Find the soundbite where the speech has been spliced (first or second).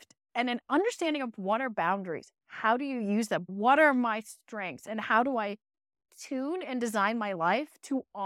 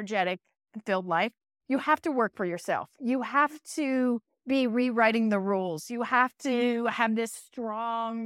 first